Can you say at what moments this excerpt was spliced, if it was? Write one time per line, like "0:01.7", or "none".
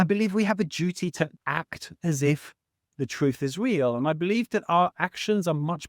0:01.4